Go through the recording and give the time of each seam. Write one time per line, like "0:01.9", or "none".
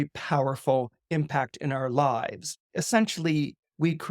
0:02.7